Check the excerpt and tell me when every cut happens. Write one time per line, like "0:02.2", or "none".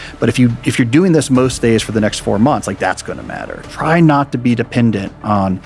0:03.6